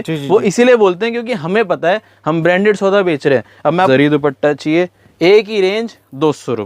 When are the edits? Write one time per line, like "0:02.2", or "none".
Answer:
0:03.9